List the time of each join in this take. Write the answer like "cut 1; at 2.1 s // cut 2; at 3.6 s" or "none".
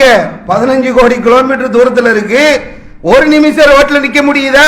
none